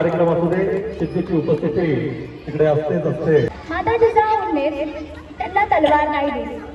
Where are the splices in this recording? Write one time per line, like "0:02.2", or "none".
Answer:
0:03.5